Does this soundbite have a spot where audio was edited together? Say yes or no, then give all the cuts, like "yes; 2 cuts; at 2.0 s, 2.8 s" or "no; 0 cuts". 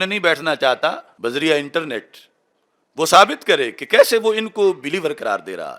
yes; 1 cut; at 1.1 s